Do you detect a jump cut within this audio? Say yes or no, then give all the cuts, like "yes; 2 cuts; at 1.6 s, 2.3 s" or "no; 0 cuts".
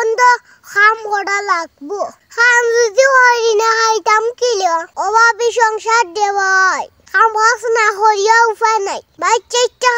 no; 0 cuts